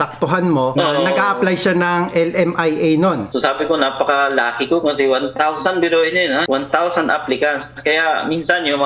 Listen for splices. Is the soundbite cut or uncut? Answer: cut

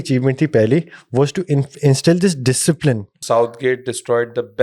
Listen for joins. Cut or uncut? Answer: cut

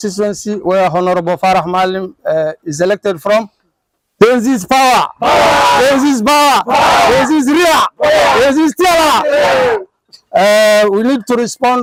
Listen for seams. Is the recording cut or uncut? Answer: uncut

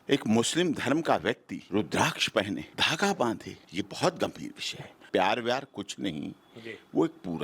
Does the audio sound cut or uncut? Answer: cut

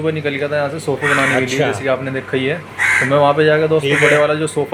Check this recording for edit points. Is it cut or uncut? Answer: uncut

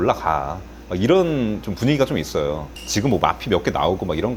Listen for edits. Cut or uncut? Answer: uncut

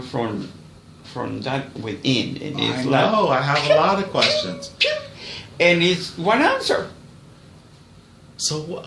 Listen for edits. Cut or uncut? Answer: uncut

